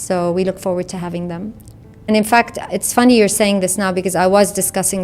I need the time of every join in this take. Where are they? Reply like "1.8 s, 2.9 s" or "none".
2.0 s